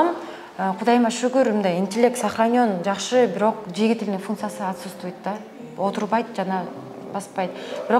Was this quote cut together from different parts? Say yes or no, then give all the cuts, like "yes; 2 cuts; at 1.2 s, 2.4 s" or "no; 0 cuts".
no; 0 cuts